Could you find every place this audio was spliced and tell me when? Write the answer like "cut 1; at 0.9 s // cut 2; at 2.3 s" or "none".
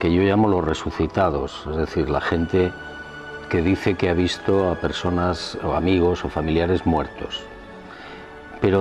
cut 1; at 6.0 s